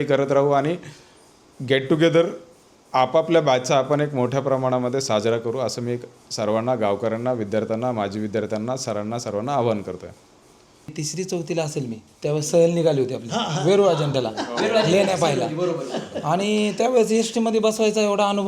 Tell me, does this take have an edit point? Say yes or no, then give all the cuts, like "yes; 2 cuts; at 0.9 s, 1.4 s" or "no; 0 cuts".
yes; 1 cut; at 10.9 s